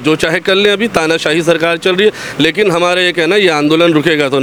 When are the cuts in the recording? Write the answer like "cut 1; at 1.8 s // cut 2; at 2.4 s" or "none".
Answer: none